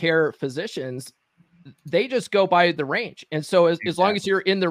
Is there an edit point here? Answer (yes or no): no